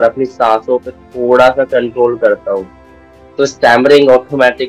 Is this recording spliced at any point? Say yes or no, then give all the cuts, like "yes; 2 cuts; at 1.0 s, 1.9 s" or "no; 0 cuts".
no; 0 cuts